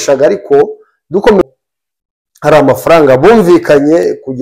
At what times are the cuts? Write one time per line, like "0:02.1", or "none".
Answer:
0:01.4